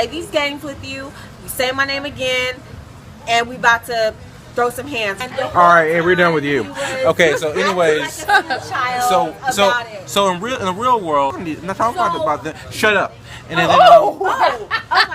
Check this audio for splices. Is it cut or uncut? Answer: cut